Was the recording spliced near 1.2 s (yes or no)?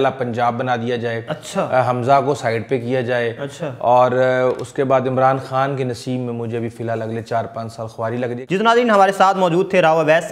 no